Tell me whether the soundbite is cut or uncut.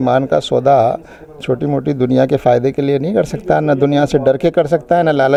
uncut